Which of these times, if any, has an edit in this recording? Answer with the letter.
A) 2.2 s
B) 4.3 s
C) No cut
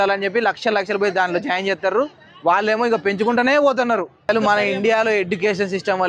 B